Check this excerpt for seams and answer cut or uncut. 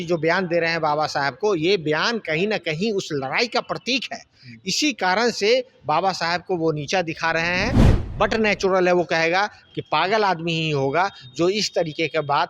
cut